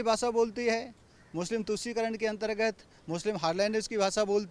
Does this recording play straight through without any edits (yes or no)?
yes